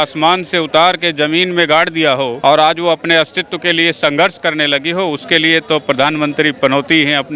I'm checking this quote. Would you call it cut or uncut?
uncut